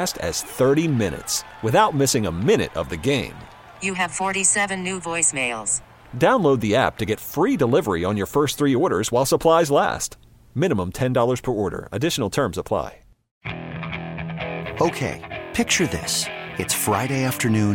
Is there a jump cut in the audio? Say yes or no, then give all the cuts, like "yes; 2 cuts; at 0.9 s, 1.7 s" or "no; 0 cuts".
yes; 1 cut; at 13.2 s